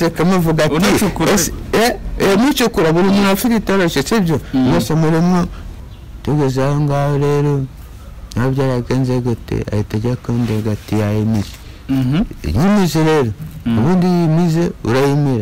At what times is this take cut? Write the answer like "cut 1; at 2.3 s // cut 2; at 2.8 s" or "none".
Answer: cut 1; at 5.6 s